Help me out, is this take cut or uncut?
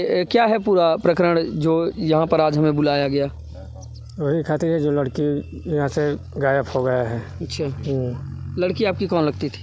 uncut